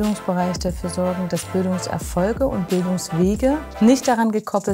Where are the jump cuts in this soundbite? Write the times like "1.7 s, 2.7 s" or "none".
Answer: none